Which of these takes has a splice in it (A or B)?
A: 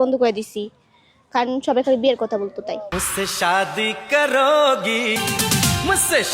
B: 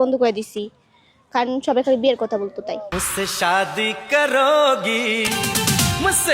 A